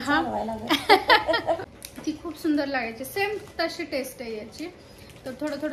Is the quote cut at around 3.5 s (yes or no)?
no